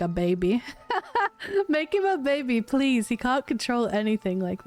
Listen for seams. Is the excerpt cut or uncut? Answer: uncut